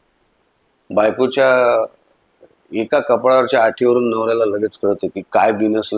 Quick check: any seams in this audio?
no; 0 cuts

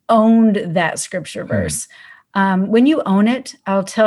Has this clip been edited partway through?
no; 0 cuts

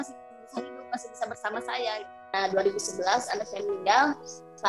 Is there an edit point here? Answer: yes; 1 cut; at 2.2 s

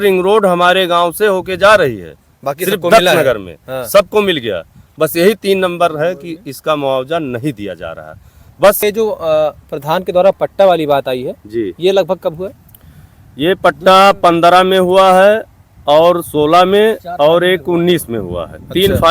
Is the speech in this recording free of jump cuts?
no; 1 cut; at 8.8 s

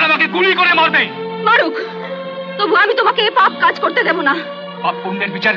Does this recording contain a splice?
no; 0 cuts

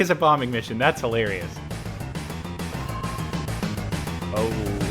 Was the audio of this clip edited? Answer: no; 0 cuts

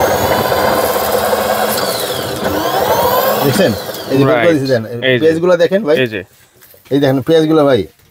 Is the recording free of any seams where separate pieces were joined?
yes; 0 cuts

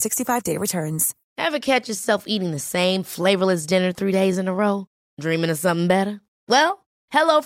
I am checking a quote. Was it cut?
yes; 1 cut; at 1.2 s

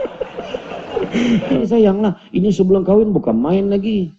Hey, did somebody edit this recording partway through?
yes; 1 cut; at 1.6 s

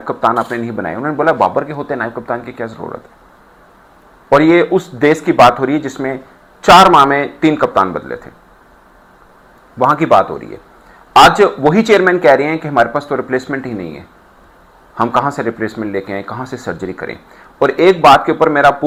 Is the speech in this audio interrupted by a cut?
no; 0 cuts

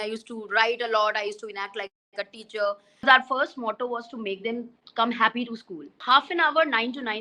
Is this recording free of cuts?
no; 2 cuts; at 3.1 s, 6.0 s

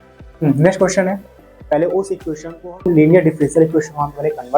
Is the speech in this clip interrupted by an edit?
yes; 1 cut; at 1.5 s

